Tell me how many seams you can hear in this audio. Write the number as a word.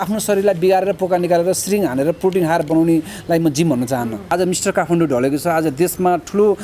one